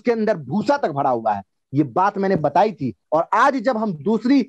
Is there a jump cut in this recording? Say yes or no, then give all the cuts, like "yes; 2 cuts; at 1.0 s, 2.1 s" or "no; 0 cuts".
no; 0 cuts